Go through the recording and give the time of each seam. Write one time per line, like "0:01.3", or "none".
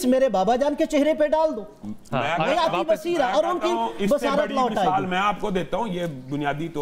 none